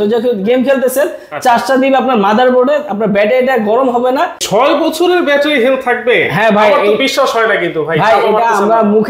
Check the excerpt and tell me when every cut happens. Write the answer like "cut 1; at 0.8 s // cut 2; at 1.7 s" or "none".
cut 1; at 4.4 s

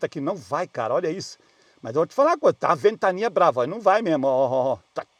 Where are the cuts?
none

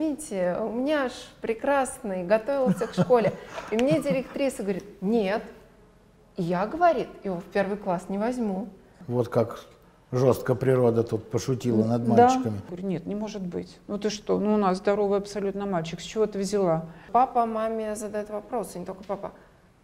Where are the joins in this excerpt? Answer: cut 1; at 9.0 s // cut 2; at 12.7 s // cut 3; at 17.1 s

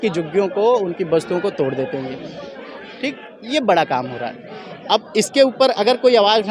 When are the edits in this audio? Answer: none

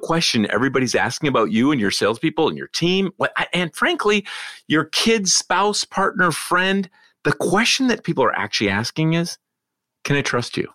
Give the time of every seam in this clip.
none

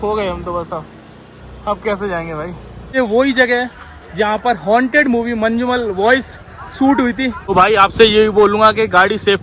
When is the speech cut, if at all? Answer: cut 1; at 2.9 s // cut 2; at 7.4 s

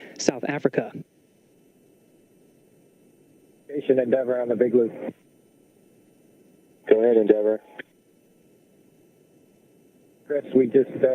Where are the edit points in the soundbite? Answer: cut 1; at 5.4 s // cut 2; at 6.8 s // cut 3; at 8.3 s // cut 4; at 10.2 s

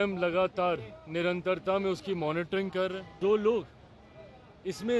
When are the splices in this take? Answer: cut 1; at 3.1 s

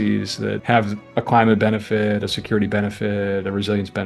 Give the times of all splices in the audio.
cut 1; at 1.0 s

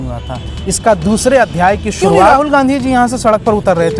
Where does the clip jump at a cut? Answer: cut 1; at 2.3 s

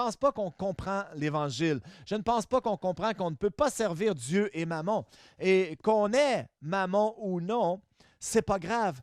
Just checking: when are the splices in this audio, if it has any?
none

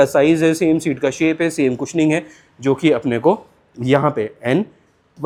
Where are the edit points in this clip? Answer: none

